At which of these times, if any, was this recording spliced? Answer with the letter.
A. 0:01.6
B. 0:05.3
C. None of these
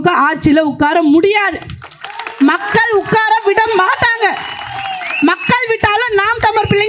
C